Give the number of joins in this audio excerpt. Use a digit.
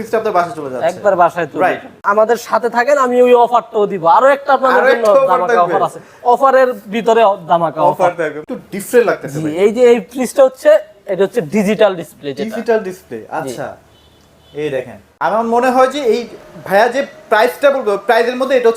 3